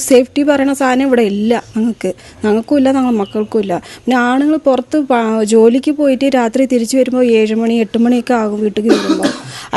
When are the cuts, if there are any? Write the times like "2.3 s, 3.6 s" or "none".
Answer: none